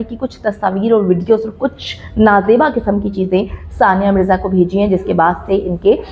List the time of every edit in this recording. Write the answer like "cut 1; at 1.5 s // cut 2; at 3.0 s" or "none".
none

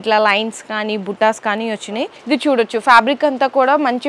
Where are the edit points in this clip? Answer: cut 1; at 2.2 s

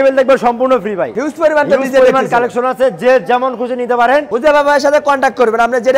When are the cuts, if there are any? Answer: cut 1; at 1.1 s // cut 2; at 4.3 s

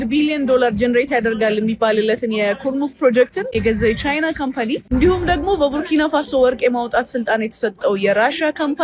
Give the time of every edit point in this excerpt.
none

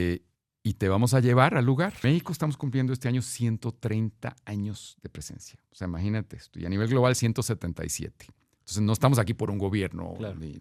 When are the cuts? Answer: cut 1; at 2.0 s

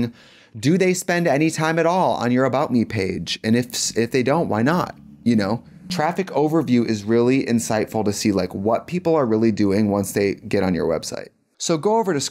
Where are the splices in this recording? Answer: cut 1; at 11.3 s

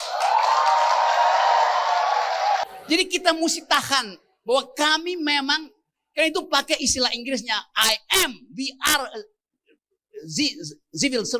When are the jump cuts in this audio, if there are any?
cut 1; at 2.6 s

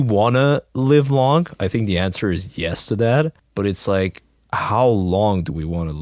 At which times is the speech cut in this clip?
cut 1; at 3.4 s

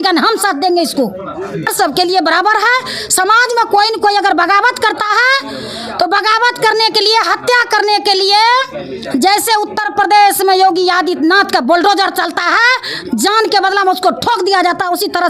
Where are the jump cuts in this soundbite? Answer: cut 1; at 1.7 s

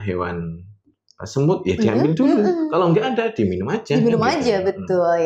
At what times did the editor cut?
none

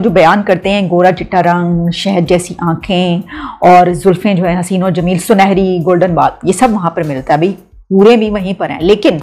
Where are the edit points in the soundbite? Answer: none

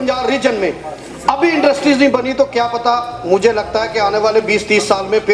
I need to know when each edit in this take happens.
none

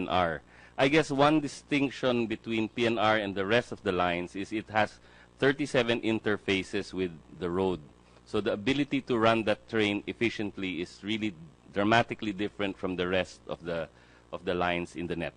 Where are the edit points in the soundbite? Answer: none

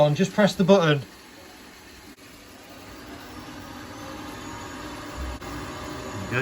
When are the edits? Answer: cut 1; at 2.1 s // cut 2; at 5.4 s

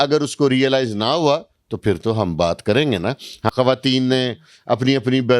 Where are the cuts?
cut 1; at 3.5 s

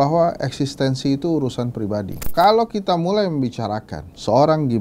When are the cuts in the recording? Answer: cut 1; at 2.2 s

